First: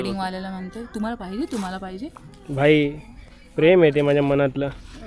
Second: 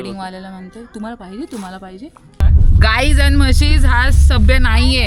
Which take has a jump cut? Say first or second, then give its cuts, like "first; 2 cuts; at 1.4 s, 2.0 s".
second; 1 cut; at 2.4 s